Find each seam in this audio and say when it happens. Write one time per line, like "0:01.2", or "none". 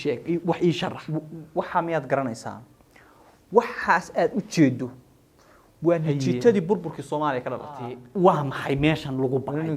0:08.0